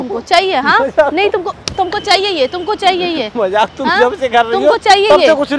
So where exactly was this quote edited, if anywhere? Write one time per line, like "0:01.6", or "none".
none